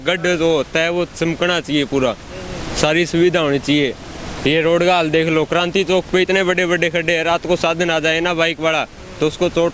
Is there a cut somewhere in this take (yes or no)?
no